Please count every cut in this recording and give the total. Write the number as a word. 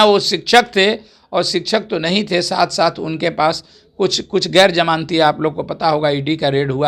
zero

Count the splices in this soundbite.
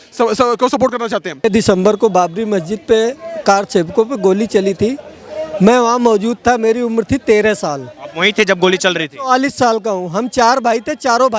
one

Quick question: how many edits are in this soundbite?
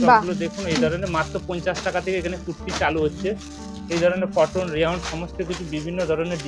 zero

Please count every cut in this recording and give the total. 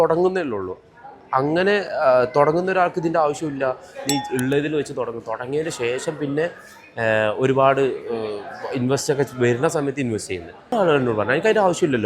one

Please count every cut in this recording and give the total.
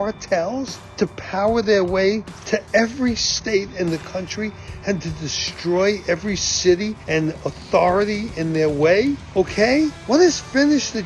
one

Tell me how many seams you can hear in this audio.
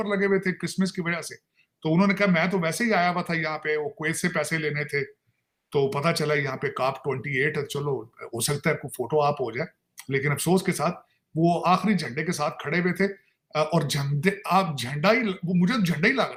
zero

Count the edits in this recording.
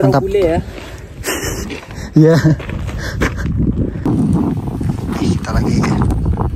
one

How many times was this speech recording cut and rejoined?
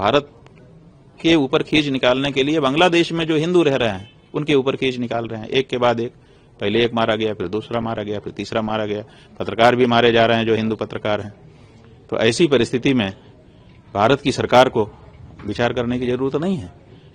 zero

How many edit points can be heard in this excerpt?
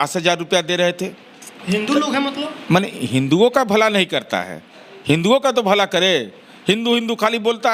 zero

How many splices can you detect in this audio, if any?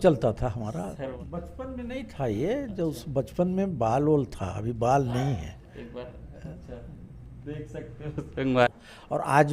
two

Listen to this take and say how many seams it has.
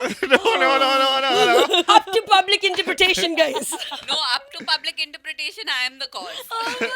zero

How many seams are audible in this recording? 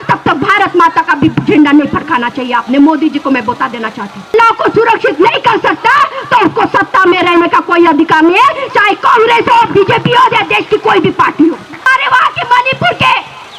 two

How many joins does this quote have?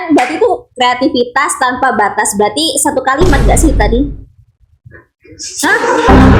zero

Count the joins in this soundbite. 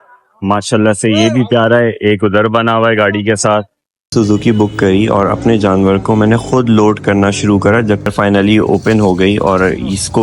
two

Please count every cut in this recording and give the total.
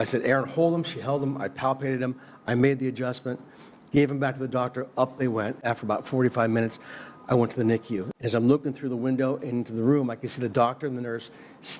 two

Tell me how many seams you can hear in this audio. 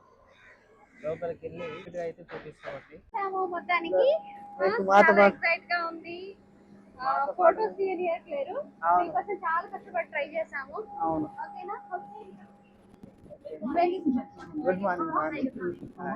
two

